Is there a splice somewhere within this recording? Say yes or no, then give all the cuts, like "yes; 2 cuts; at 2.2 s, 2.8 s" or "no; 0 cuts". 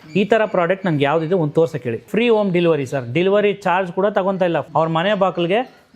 yes; 2 cuts; at 2.0 s, 4.7 s